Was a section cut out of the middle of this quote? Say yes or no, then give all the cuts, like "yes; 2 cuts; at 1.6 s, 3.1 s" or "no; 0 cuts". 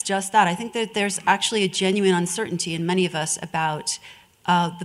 no; 0 cuts